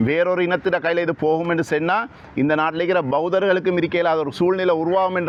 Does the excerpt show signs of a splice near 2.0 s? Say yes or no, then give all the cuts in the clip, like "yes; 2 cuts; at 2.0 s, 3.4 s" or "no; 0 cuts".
no; 0 cuts